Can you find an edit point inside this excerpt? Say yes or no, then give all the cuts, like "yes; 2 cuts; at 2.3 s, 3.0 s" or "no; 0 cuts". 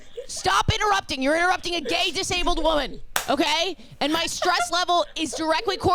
no; 0 cuts